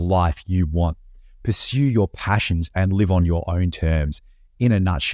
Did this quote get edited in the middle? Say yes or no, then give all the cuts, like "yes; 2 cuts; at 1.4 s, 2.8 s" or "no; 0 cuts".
no; 0 cuts